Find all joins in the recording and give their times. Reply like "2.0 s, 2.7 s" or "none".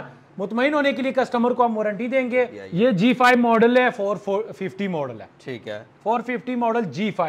2.6 s

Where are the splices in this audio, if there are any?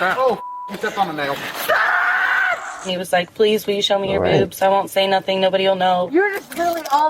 2.8 s, 6.1 s

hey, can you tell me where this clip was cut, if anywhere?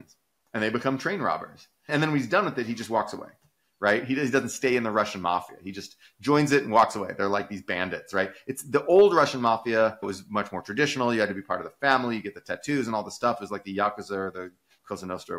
1.9 s, 10.1 s

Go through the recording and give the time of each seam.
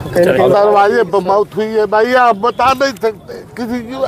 none

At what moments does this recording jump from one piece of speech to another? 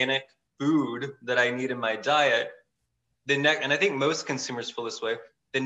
none

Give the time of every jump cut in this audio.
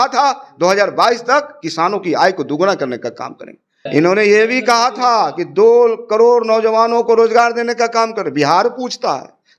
3.8 s

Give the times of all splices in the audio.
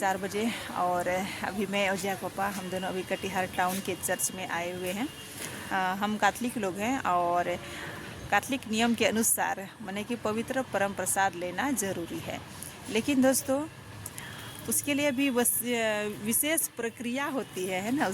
5.6 s

